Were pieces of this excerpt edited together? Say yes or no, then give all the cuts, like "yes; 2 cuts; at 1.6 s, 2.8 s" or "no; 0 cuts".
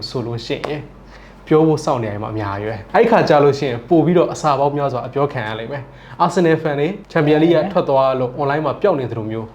yes; 2 cuts; at 2.8 s, 7.0 s